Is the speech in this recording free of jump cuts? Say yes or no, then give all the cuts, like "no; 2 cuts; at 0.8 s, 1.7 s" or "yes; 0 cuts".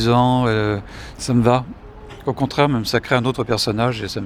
yes; 0 cuts